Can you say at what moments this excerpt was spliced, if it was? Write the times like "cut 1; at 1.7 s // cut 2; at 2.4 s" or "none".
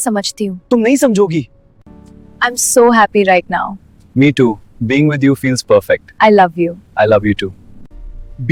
none

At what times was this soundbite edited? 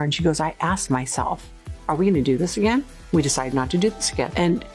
none

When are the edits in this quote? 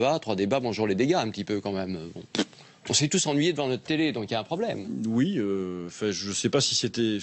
none

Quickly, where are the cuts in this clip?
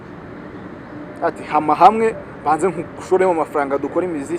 none

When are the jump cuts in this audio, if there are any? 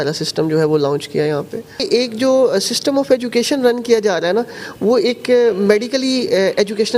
cut 1; at 1.8 s

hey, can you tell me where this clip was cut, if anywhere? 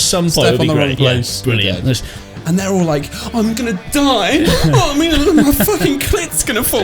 cut 1; at 2.1 s

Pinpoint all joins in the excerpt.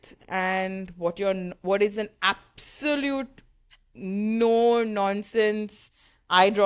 none

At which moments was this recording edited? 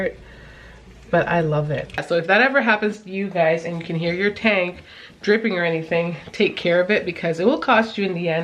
cut 1; at 1.9 s

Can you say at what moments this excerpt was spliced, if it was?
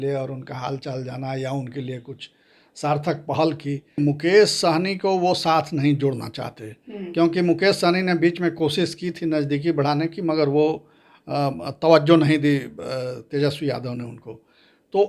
cut 1; at 4.0 s

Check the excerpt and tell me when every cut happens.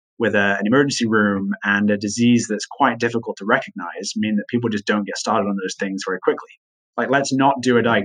cut 1; at 6.8 s

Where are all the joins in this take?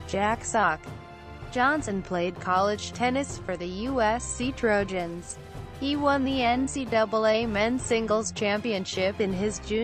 none

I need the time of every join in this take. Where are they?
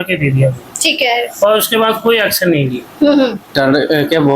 cut 1; at 3.5 s

